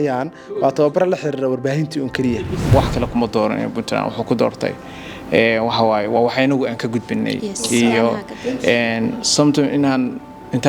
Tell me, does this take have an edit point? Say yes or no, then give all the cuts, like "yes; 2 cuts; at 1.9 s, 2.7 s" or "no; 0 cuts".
yes; 1 cut; at 2.7 s